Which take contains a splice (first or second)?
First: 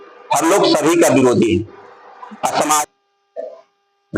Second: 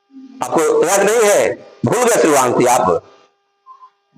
first